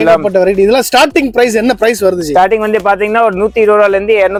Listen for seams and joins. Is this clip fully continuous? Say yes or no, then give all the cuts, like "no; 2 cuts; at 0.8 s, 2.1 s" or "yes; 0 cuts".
yes; 0 cuts